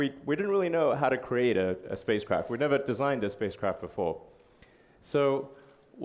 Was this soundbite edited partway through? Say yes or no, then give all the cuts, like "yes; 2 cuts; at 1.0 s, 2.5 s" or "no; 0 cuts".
no; 0 cuts